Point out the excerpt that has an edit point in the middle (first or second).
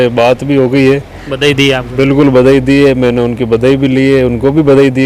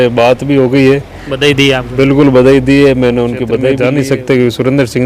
second